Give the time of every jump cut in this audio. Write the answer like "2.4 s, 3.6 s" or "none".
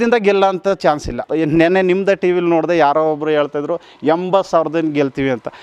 1.2 s